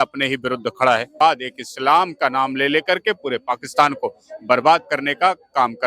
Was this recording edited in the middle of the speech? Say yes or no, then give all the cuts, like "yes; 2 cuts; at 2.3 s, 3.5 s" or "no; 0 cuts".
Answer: yes; 1 cut; at 1.2 s